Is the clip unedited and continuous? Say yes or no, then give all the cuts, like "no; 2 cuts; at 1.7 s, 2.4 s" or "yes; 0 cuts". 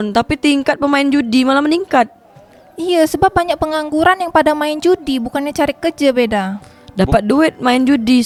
yes; 0 cuts